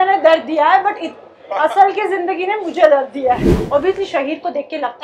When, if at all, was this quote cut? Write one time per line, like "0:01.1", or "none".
0:03.5